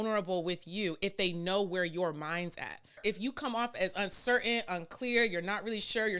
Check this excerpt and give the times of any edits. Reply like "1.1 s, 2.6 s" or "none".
3.0 s